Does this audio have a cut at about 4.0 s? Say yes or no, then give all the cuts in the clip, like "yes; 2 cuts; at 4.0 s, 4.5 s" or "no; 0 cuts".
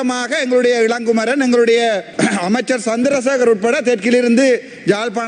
no; 1 cut; at 2.1 s